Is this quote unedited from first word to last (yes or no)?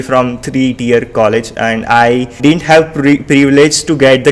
no